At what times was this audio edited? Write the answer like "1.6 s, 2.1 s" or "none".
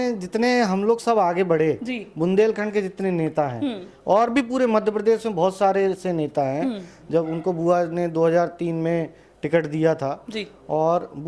none